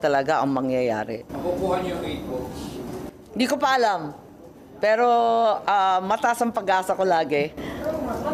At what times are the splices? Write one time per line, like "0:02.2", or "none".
none